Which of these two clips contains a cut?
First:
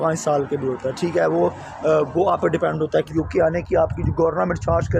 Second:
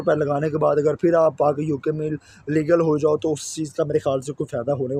first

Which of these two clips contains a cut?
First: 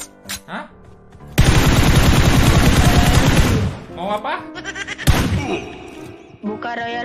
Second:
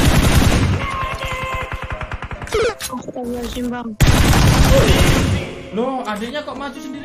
second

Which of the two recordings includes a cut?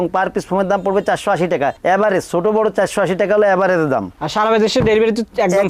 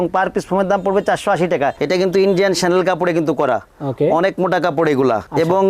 second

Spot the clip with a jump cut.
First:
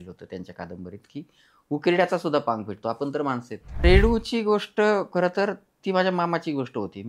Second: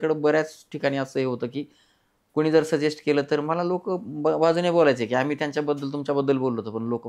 first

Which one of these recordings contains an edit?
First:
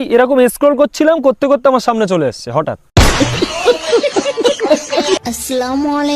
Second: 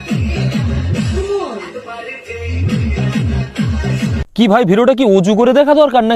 first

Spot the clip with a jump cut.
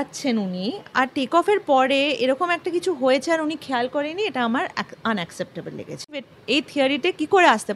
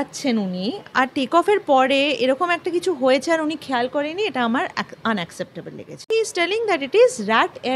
second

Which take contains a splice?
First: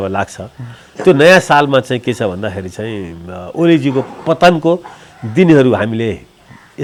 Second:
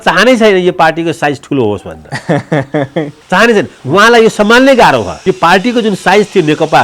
second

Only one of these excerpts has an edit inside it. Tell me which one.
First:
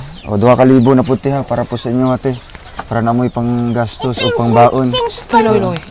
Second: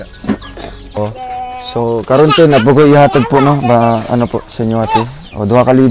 second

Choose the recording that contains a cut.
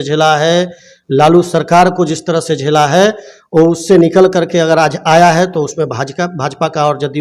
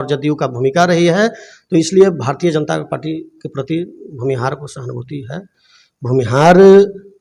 second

